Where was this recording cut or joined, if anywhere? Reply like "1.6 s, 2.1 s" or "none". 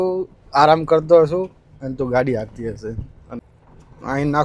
3.4 s